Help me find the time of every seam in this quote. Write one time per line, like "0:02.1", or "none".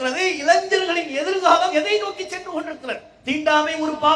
0:03.1